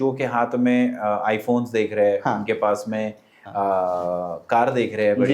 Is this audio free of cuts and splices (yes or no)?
yes